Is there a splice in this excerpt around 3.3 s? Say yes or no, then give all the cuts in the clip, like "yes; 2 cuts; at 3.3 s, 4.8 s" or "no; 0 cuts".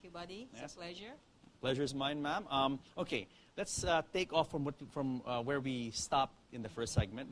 yes; 1 cut; at 3.3 s